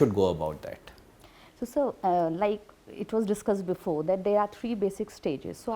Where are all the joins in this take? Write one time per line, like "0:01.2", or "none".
none